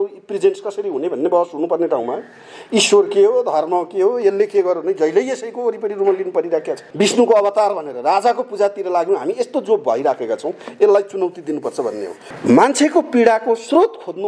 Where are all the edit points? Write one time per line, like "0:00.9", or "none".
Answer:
0:06.8
0:12.2